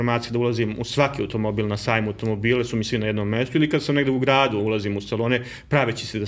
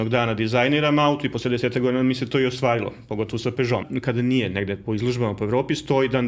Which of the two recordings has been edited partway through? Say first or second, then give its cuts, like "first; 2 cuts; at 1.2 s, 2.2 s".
second; 1 cut; at 3.8 s